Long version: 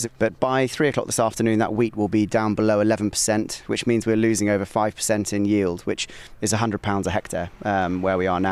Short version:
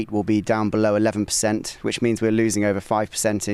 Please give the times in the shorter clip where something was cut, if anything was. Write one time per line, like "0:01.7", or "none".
none

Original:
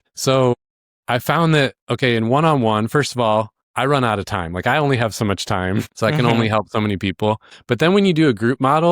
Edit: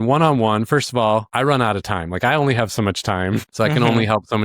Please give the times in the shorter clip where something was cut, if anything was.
0:01.3

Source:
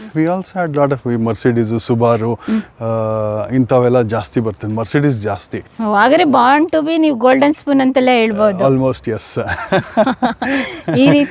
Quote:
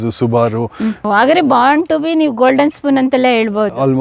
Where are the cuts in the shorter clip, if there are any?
0:01.0

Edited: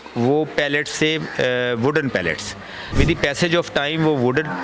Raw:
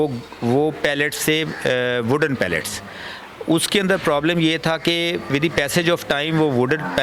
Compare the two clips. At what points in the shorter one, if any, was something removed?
0:02.9

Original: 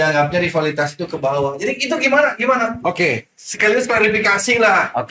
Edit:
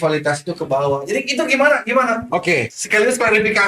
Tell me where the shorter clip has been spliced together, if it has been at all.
0:02.8

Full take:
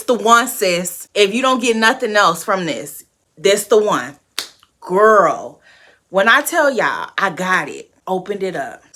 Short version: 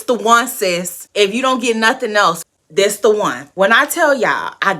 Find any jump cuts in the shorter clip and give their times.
0:02.4
0:03.4

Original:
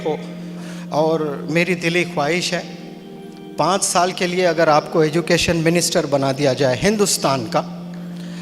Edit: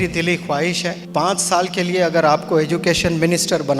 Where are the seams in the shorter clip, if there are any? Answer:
0:01.0

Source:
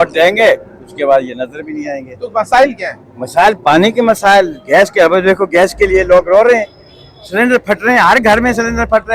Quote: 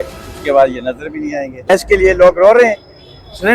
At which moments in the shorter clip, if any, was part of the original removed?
0:01.7

